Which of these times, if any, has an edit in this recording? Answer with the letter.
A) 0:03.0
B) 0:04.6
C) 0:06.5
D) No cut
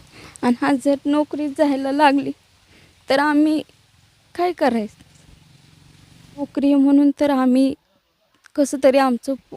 C